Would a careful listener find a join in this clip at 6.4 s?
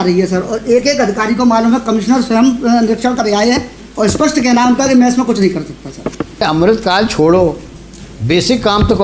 yes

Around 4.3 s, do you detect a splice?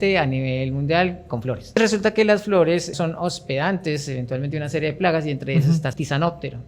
no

